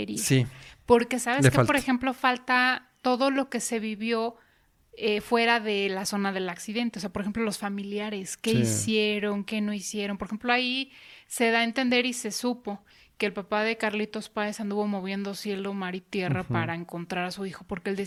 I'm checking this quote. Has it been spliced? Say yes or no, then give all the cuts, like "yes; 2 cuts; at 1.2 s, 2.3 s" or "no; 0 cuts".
no; 0 cuts